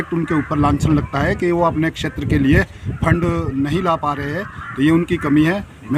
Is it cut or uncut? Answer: uncut